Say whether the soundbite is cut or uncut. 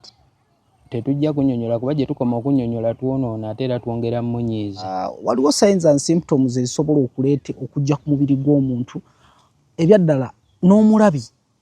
cut